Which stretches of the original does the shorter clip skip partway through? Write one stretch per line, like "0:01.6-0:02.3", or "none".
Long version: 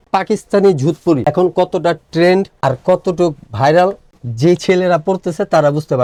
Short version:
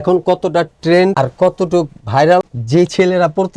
0:02.4-0:02.6
0:04.0-0:04.3